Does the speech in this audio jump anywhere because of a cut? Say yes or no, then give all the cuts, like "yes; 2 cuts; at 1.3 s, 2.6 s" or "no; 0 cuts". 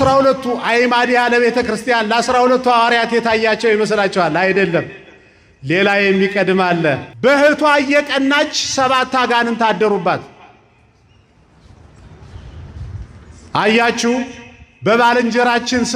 yes; 1 cut; at 7.1 s